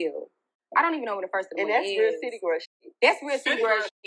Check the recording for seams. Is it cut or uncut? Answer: uncut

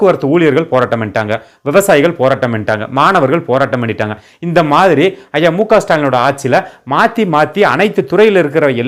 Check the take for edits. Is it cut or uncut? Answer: uncut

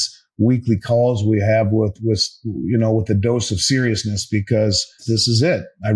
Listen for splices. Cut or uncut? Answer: cut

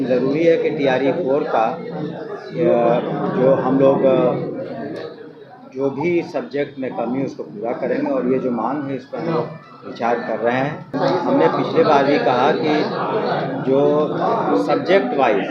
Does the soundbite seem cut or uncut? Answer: cut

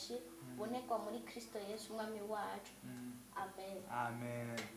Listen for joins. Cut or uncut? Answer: uncut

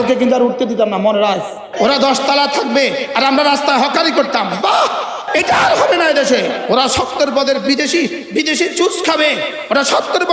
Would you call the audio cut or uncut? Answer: cut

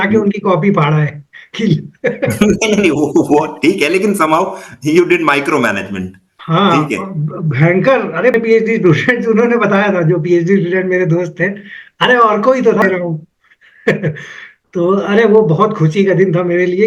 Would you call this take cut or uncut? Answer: cut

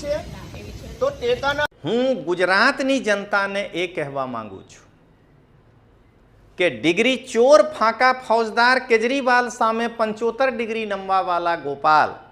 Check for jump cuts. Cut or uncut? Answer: cut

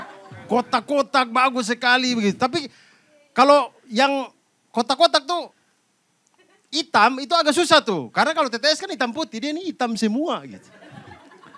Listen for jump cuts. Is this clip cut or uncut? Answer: uncut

